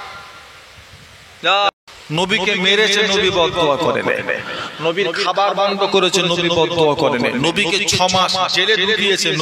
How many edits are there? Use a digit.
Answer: 1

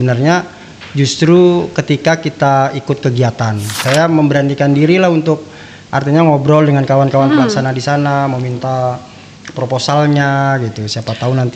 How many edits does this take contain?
1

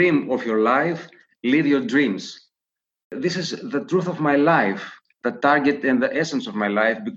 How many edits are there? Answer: 1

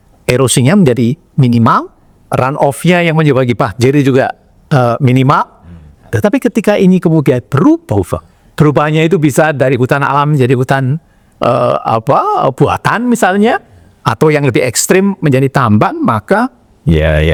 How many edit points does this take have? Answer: 0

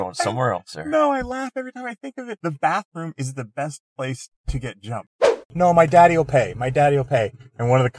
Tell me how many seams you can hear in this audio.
2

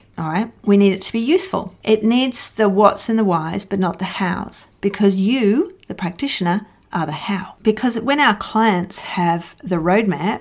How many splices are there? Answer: 1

